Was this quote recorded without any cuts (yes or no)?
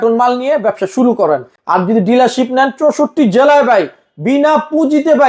yes